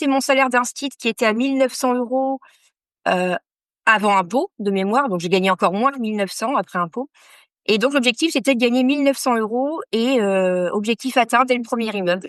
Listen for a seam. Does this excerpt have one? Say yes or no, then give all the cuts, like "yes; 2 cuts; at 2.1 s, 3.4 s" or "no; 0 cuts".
no; 0 cuts